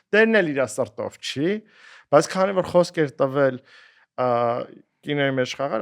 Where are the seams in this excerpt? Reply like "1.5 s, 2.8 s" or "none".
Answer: none